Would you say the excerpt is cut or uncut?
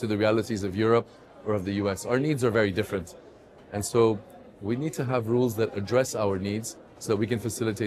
uncut